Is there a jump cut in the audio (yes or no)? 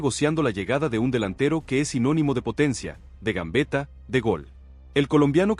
no